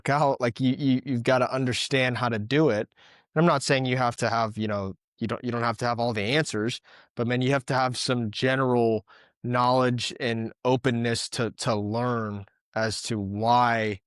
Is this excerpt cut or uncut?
uncut